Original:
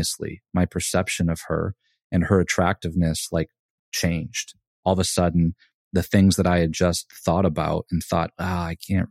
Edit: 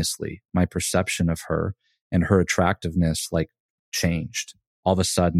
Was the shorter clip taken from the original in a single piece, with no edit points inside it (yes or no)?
yes